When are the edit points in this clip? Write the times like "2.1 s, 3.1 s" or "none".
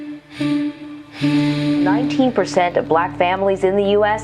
1.5 s